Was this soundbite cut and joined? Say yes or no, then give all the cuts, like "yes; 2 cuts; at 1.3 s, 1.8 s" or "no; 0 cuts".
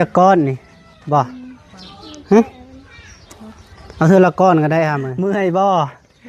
yes; 1 cut; at 5.1 s